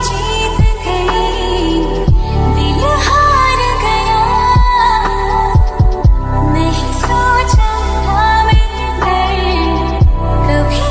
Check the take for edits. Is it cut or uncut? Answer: uncut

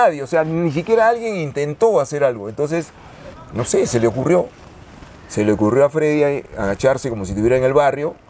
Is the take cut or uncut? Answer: uncut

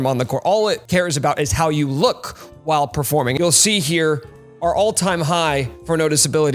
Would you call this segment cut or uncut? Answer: uncut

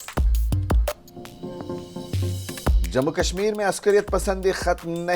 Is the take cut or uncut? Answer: cut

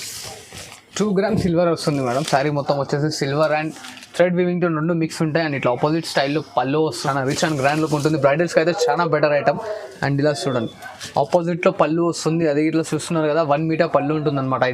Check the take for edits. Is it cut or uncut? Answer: cut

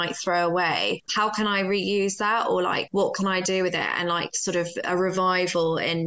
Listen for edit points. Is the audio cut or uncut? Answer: uncut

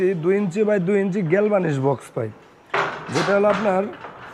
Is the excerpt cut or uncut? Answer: uncut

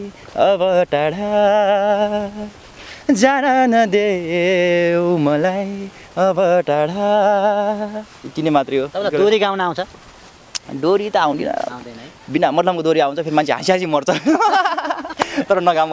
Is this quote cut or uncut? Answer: uncut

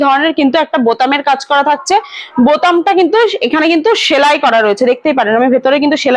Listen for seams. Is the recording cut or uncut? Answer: uncut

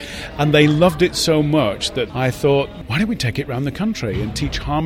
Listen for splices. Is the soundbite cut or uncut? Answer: cut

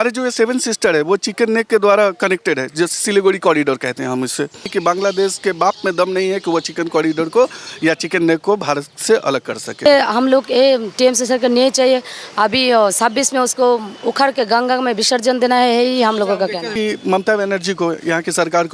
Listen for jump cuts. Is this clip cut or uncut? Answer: cut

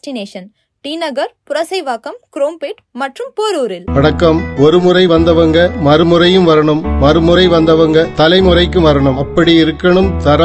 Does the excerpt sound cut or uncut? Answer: cut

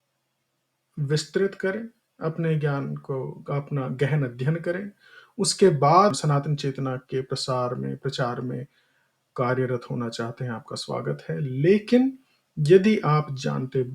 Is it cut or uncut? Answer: cut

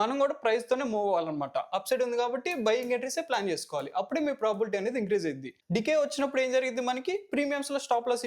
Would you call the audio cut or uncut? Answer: cut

